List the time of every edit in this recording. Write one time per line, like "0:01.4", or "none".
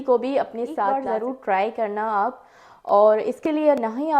0:00.9